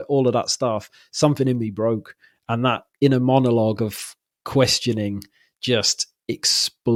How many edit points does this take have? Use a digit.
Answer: 0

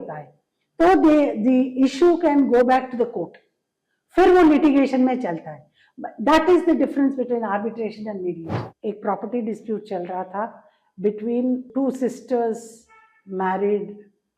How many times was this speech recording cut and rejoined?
2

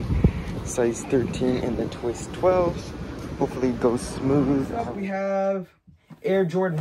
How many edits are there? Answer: 1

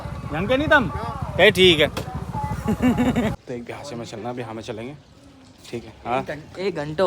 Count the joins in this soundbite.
1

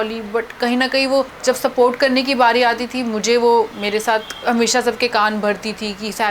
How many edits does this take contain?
2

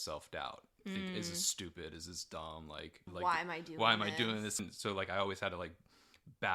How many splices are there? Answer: 2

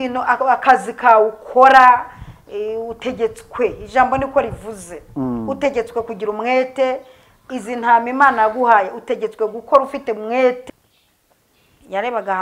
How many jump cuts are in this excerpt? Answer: 1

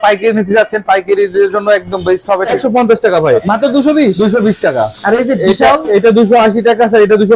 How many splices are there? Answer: 2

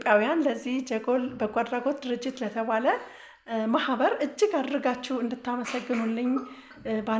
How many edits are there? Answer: 0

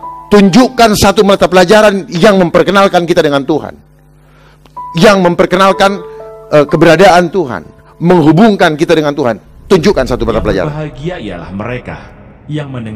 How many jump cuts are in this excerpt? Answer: 1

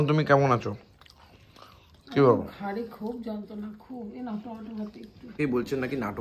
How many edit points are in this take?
1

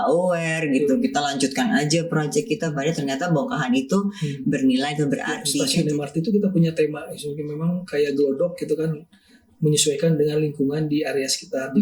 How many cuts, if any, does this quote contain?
1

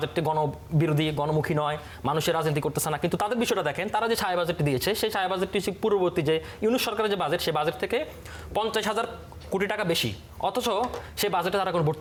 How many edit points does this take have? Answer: 0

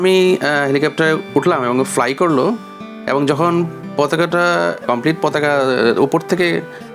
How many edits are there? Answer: 0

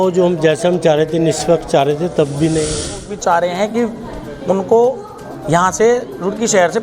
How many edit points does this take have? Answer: 1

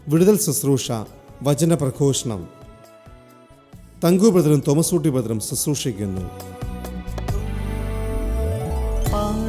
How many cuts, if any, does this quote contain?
1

